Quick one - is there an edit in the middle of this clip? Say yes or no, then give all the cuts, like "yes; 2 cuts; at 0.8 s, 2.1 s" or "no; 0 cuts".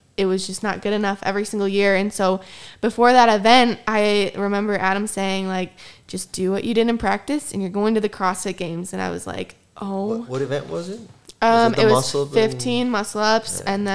no; 0 cuts